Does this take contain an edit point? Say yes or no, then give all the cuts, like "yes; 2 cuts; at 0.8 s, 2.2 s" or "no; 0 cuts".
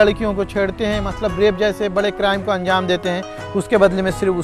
no; 0 cuts